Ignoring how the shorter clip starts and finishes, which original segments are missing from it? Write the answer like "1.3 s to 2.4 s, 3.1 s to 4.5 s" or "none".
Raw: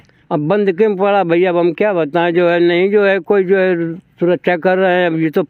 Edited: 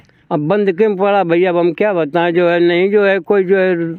none